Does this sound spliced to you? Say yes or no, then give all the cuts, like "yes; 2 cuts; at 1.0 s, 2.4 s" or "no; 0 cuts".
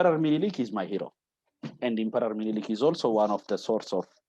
no; 0 cuts